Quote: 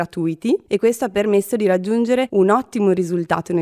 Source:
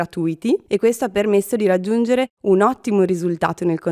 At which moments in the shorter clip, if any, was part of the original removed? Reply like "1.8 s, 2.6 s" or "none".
2.3 s